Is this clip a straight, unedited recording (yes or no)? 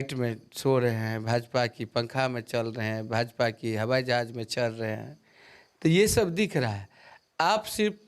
yes